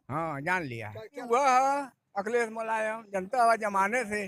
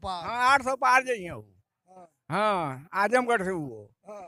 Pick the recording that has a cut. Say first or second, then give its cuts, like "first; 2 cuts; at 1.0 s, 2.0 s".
first; 1 cut; at 1.2 s